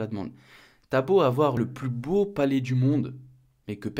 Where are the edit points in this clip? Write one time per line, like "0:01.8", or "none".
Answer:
0:01.6